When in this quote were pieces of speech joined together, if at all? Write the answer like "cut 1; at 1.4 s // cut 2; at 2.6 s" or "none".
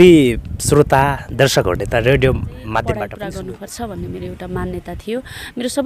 cut 1; at 3.1 s

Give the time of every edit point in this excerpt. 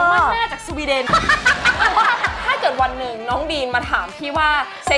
cut 1; at 2.3 s

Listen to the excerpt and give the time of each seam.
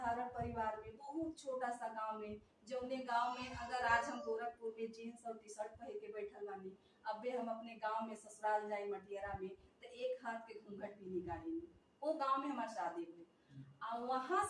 none

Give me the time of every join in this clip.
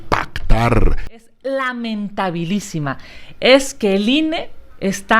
cut 1; at 1.1 s

